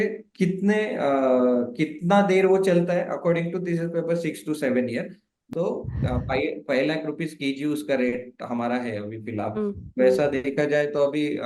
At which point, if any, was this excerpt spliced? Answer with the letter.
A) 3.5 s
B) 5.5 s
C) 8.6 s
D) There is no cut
B